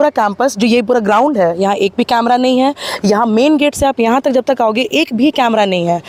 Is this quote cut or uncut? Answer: uncut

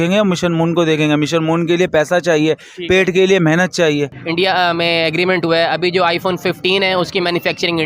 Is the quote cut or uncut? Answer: cut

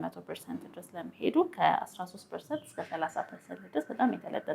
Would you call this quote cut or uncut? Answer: uncut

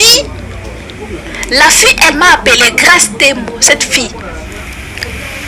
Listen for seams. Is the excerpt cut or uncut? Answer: uncut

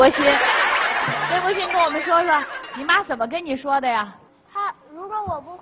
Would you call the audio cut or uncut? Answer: cut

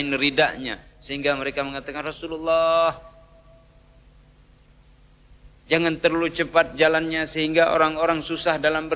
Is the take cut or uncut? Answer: uncut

